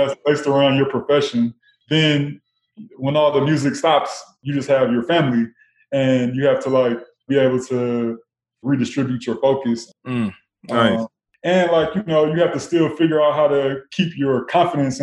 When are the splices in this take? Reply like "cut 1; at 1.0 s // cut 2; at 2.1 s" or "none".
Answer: cut 1; at 1.7 s // cut 2; at 4.4 s // cut 3; at 7.2 s // cut 4; at 8.6 s // cut 5; at 9.9 s // cut 6; at 11.3 s